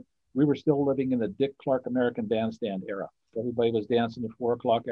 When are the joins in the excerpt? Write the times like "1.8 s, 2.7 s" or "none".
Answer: 3.3 s

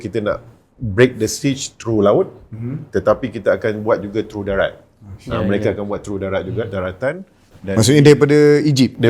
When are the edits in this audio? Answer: none

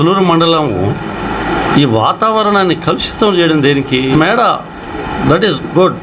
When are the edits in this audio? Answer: 4.1 s

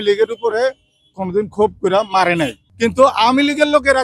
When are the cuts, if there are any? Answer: 2.6 s

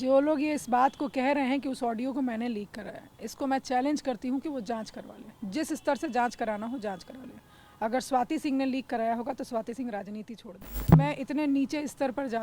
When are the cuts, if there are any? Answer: 10.8 s

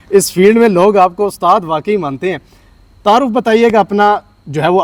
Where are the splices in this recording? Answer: none

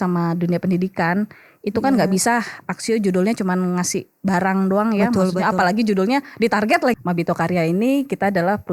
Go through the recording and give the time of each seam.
6.9 s

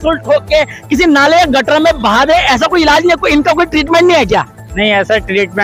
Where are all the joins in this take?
none

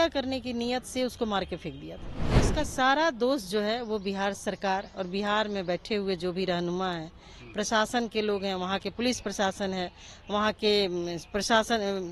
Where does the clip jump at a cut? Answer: 2.1 s

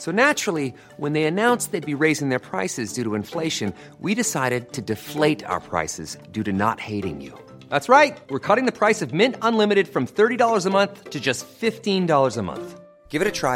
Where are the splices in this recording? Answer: none

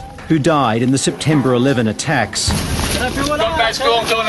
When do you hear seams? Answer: 2.9 s

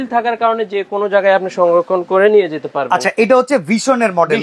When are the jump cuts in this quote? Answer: none

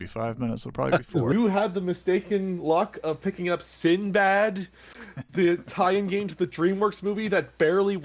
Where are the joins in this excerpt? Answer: 1.3 s

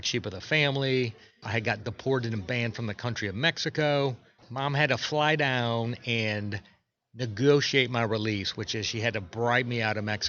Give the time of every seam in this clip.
1.4 s, 4.4 s

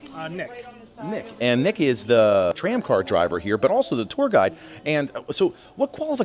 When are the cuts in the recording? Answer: 2.6 s

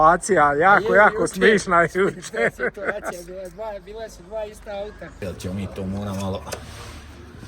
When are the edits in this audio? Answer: 5.2 s

